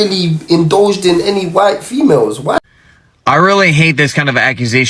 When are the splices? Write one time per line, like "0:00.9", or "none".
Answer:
0:02.6